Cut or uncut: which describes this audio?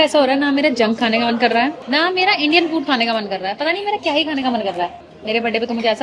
uncut